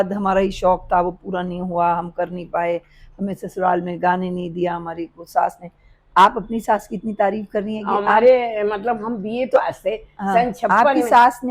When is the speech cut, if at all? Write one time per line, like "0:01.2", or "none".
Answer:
none